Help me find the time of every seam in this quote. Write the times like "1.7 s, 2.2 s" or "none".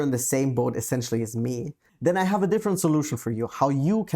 1.8 s